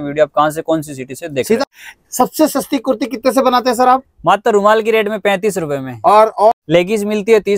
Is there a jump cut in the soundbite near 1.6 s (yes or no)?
yes